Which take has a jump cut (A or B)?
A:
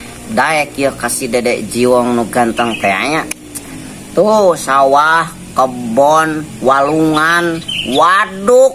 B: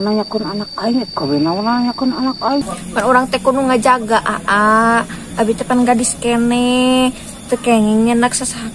B